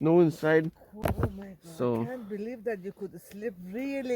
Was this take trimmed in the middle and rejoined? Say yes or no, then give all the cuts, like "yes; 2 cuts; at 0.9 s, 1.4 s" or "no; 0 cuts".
yes; 1 cut; at 1.0 s